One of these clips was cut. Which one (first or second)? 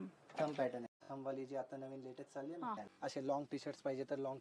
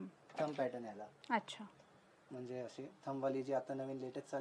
first